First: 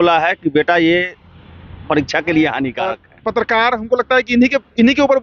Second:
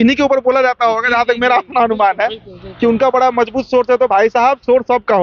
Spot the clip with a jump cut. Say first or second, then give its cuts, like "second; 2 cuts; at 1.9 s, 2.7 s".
first; 1 cut; at 3.1 s